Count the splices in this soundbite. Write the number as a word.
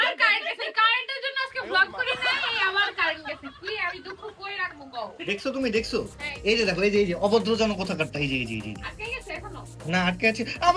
one